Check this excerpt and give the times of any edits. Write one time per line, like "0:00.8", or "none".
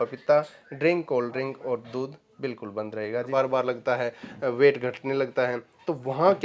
0:03.3